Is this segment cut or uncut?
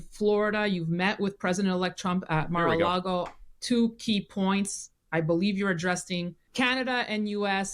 cut